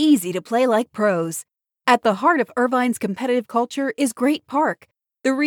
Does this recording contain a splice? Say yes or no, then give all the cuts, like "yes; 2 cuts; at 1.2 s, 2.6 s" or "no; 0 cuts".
no; 0 cuts